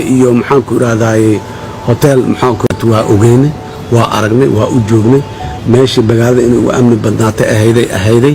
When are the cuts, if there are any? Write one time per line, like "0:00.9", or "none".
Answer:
0:02.7